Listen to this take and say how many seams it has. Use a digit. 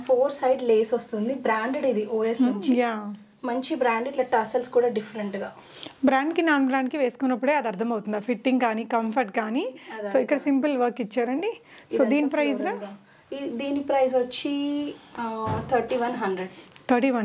0